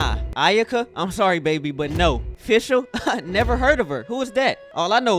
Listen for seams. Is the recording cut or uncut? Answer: uncut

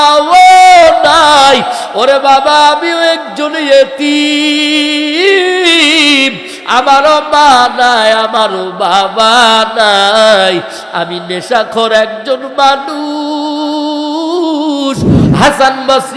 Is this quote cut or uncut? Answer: cut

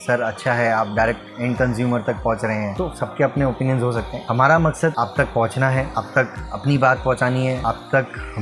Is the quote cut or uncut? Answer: cut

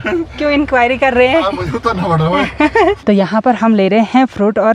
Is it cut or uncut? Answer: cut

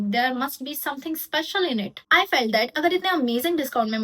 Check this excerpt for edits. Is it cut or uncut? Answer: cut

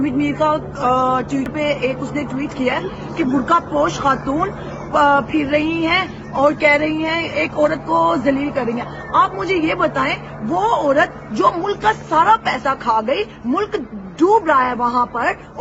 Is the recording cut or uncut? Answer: cut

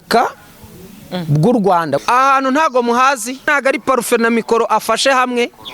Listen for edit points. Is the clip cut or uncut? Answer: cut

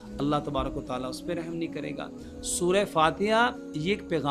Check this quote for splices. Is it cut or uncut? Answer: uncut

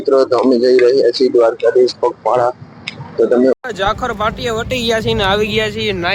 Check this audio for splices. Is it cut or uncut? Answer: cut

